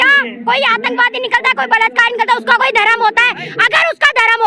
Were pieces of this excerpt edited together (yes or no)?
no